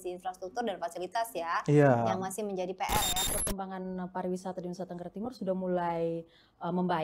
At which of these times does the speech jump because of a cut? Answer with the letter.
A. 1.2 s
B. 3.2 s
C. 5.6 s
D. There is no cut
B